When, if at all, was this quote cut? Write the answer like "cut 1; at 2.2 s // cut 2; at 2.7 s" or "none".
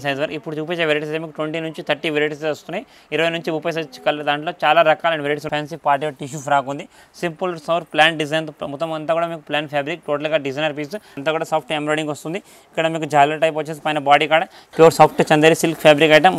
cut 1; at 5.4 s // cut 2; at 11.2 s // cut 3; at 14.6 s